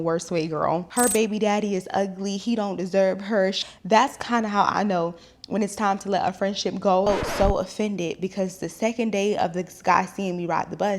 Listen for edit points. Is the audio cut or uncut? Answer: cut